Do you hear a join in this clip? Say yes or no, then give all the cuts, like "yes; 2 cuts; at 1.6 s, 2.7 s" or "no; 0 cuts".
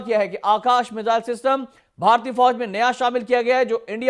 no; 0 cuts